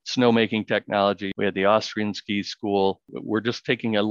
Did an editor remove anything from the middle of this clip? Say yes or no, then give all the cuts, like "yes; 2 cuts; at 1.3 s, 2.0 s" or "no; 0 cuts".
yes; 2 cuts; at 1.3 s, 3.1 s